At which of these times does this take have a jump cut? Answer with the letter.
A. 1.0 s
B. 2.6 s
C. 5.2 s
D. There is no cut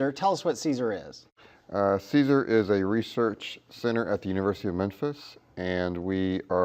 B